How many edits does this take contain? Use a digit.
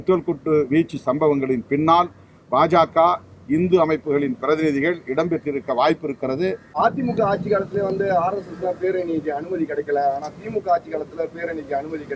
1